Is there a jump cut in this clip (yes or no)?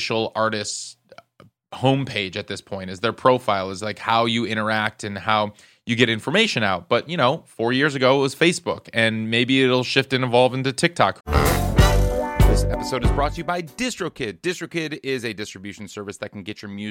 yes